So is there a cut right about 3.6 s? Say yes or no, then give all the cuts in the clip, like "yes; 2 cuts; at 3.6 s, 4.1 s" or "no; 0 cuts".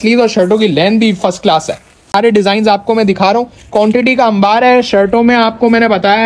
no; 1 cut; at 2.1 s